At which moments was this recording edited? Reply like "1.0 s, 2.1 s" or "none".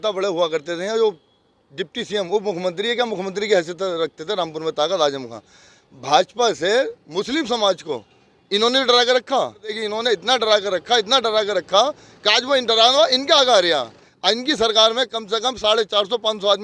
9.8 s, 14.0 s